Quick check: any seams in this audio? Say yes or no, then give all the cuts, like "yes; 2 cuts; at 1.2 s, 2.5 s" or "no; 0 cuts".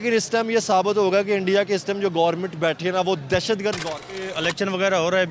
yes; 1 cut; at 4.2 s